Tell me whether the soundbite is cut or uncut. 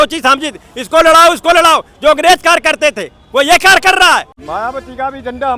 cut